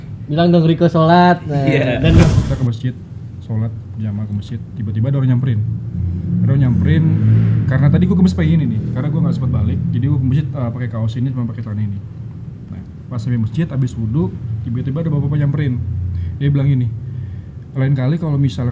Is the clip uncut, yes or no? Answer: no